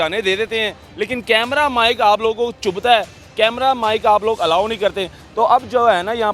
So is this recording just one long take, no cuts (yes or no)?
yes